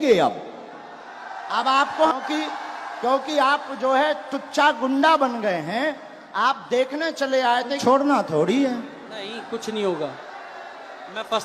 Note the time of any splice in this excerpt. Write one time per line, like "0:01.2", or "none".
0:02.1
0:07.8